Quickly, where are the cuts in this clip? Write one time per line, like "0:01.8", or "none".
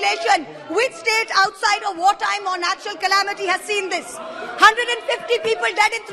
none

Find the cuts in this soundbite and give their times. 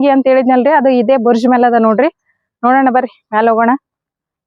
none

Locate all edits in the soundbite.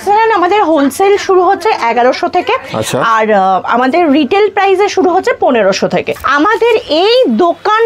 0:06.2

